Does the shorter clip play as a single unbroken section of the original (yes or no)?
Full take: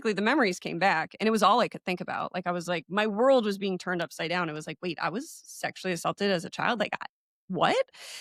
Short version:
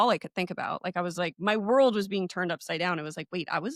yes